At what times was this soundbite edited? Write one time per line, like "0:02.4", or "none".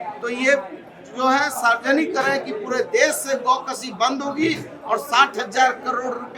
none

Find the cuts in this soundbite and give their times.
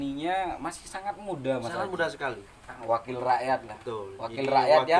0:02.8

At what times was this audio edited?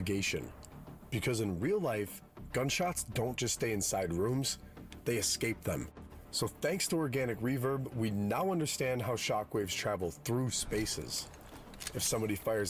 none

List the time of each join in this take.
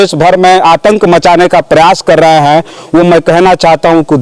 none

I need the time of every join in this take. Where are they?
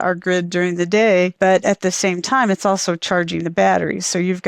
0:01.3

